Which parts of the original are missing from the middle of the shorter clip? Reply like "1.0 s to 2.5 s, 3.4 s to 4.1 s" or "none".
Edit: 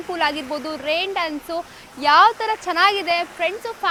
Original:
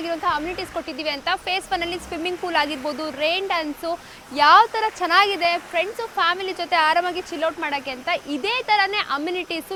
none